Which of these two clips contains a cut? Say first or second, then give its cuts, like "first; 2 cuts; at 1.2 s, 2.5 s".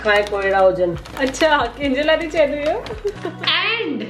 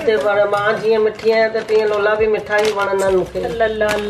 first; 1 cut; at 3.2 s